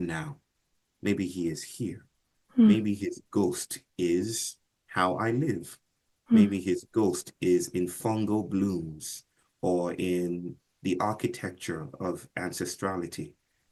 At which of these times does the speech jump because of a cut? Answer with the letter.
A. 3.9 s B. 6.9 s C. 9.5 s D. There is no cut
D